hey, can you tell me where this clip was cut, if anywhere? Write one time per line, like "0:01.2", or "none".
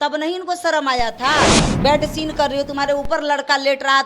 0:01.7